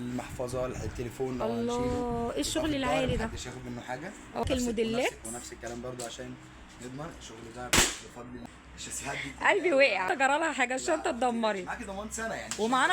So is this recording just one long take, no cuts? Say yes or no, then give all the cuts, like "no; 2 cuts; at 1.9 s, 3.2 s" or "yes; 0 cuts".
no; 3 cuts; at 4.4 s, 8.4 s, 10.1 s